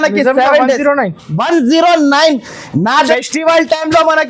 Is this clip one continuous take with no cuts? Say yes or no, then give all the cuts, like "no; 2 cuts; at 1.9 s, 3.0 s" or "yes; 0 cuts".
no; 1 cut; at 3.1 s